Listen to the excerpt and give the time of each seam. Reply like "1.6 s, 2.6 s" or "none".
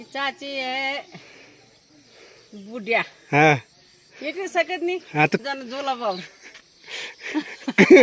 5.4 s